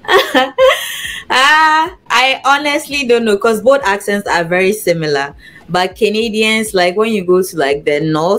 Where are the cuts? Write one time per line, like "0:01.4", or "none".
none